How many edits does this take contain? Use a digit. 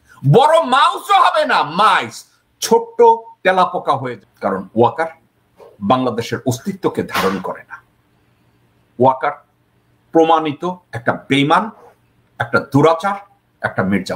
1